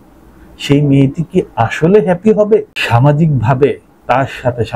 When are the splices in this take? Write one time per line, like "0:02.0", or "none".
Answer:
0:02.8